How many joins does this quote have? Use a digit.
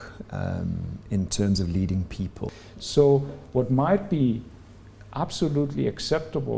1